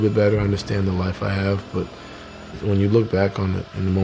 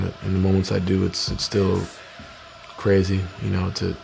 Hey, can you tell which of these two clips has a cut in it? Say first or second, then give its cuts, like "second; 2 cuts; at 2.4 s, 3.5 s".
first; 1 cut; at 2.5 s